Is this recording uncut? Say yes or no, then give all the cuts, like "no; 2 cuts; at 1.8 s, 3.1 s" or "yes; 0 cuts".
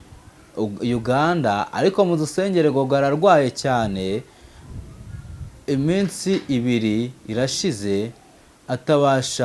yes; 0 cuts